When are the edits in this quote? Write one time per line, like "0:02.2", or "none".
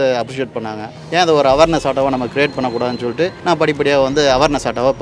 0:00.9
0:03.4